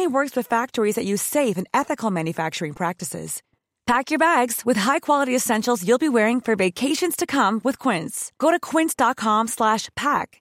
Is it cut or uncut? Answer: uncut